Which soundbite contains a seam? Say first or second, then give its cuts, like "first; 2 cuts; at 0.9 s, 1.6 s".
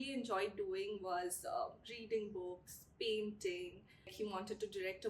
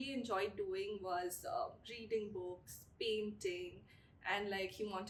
first; 1 cut; at 4.1 s